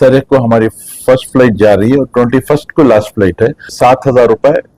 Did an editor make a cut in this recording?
yes; 1 cut; at 3.7 s

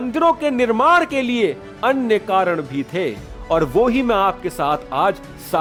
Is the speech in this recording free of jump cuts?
yes; 0 cuts

